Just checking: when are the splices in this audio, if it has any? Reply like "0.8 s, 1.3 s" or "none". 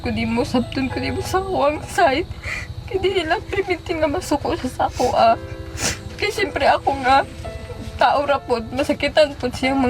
none